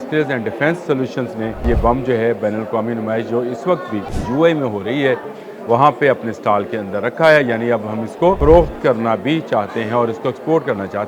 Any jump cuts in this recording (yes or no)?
yes